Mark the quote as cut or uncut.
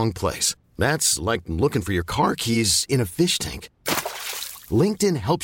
uncut